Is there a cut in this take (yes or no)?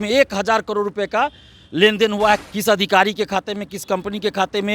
yes